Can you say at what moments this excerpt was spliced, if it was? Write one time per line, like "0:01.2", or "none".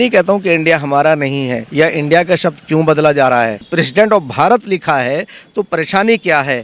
0:01.6
0:03.7